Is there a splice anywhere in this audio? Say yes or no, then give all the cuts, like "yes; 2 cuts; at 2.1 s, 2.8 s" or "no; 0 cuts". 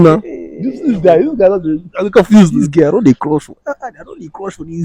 no; 0 cuts